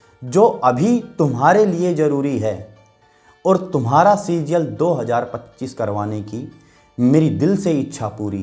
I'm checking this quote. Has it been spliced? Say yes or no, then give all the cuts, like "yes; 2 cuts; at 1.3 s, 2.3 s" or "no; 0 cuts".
no; 0 cuts